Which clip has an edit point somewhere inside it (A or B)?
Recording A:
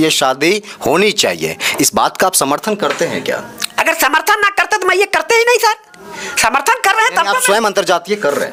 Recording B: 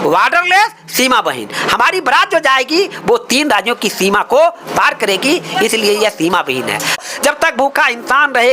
B